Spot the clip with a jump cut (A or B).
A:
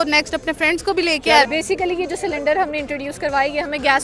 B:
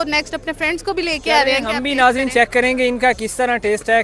A